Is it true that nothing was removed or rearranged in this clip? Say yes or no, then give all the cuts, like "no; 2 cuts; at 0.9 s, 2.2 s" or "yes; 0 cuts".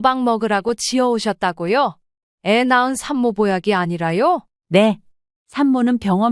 no; 1 cut; at 4.8 s